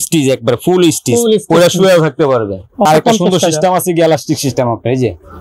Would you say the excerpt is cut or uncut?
cut